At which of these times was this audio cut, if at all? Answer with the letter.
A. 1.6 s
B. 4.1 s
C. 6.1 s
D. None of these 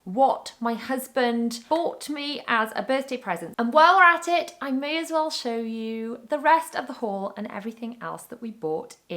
A